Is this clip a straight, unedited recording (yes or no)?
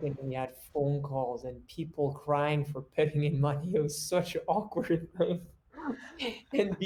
yes